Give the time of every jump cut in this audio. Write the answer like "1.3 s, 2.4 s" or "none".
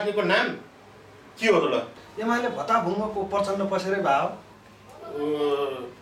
2.0 s